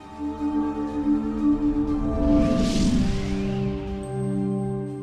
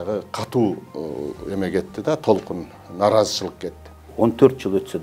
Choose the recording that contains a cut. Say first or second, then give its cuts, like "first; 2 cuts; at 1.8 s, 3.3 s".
second; 1 cut; at 4.0 s